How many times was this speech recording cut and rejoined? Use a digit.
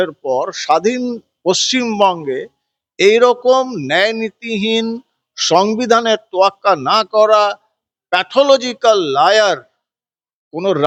0